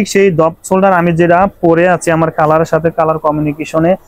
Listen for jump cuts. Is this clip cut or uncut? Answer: uncut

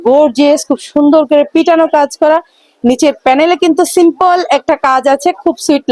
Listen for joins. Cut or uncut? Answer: uncut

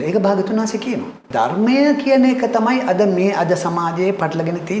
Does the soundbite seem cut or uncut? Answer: cut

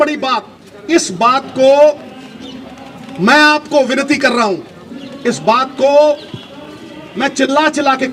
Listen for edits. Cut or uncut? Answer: uncut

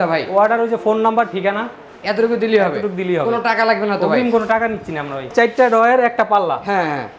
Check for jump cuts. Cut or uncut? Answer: cut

